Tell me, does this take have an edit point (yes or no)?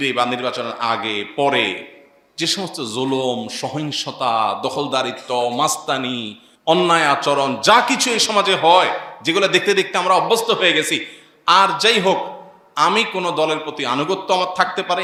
no